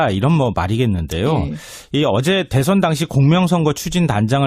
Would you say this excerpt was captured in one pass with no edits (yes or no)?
no